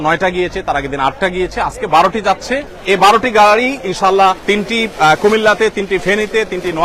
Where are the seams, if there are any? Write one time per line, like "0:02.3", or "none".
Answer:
0:02.7
0:04.4